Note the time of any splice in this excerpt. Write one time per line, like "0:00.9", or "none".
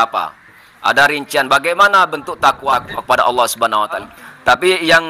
0:02.7
0:04.1